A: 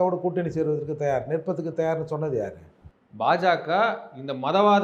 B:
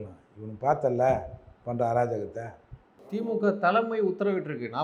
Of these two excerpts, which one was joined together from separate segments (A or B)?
B